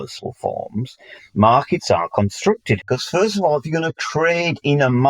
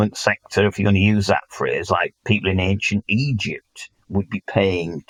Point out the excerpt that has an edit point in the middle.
first; 1 cut; at 2.8 s

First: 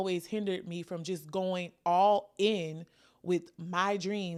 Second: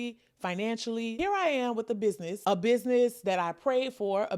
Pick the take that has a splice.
second; 2 cuts; at 1.1 s, 2.3 s

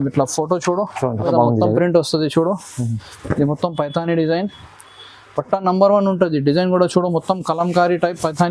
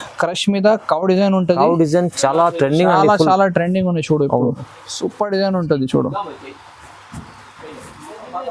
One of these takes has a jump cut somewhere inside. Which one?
first; 1 cut; at 1.2 s

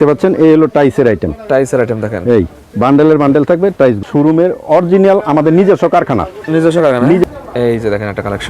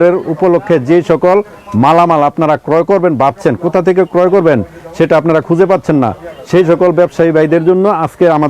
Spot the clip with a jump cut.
first; 2 cuts; at 4.0 s, 7.2 s

